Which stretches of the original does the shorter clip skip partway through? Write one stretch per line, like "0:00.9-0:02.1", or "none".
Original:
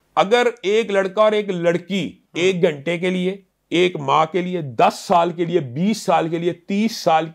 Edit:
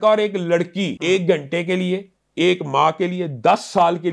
0:02.1-0:02.3